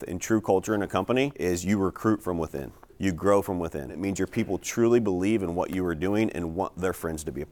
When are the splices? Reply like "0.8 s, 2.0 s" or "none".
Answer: 1.4 s, 4.0 s